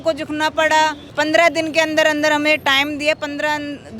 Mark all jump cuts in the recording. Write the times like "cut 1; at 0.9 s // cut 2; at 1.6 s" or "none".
cut 1; at 1.0 s